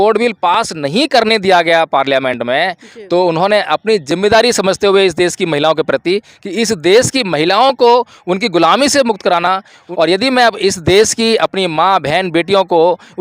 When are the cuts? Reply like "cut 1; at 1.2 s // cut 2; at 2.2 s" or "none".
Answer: cut 1; at 9.8 s